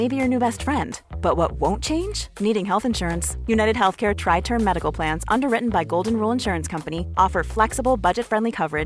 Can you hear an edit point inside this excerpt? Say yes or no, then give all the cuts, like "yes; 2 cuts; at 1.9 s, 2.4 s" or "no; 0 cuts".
no; 0 cuts